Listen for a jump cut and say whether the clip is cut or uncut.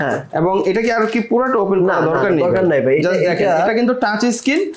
uncut